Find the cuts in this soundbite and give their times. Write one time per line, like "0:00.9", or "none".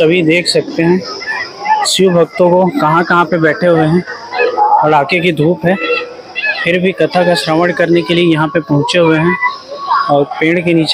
none